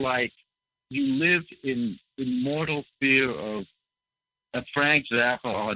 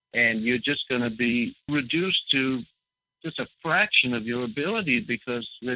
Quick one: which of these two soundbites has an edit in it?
second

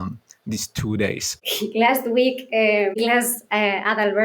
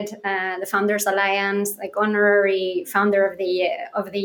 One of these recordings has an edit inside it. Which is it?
first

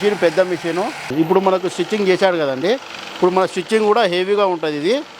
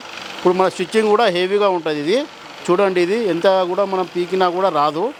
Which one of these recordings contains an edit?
first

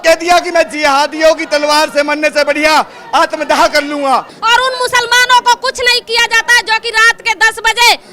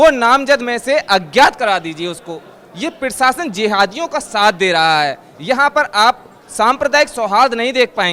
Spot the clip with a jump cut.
first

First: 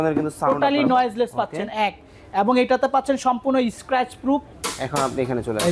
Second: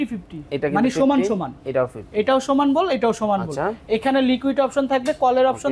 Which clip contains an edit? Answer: first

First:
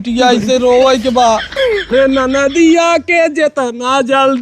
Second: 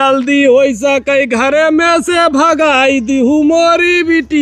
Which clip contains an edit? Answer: first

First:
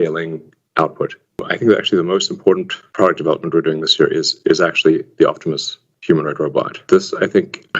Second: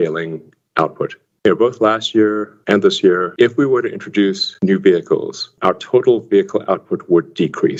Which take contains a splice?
first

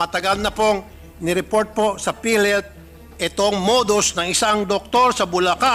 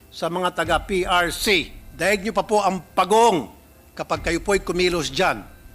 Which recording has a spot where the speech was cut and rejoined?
second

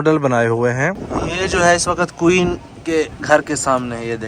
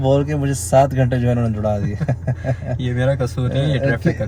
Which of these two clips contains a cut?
first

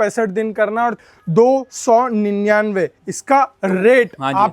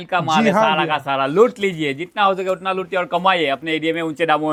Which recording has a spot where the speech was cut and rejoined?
first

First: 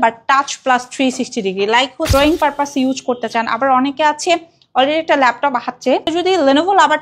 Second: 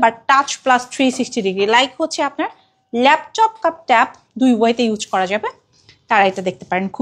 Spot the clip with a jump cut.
first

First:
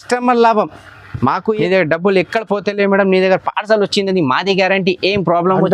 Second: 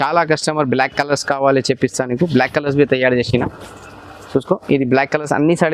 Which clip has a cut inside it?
first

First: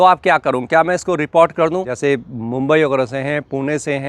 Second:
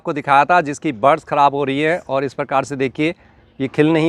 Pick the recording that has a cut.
first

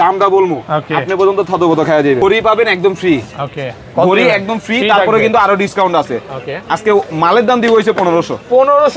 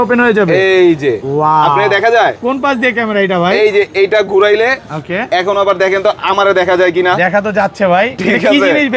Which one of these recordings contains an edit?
first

